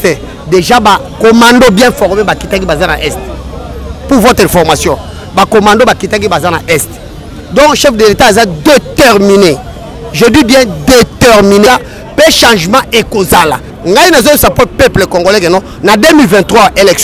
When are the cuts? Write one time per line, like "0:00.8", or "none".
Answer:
0:11.7
0:13.7